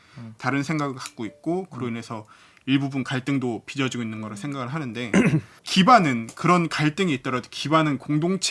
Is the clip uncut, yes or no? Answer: no